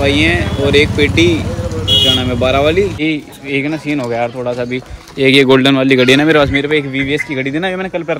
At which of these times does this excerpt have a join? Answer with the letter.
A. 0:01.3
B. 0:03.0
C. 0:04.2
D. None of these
B